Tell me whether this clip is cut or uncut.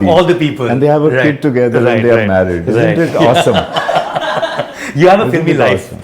uncut